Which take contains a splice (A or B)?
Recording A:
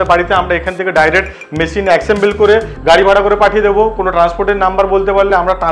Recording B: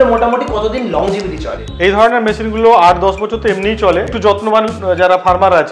B